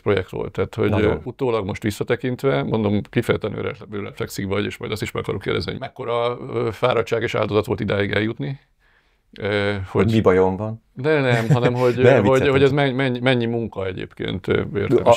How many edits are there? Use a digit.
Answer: 2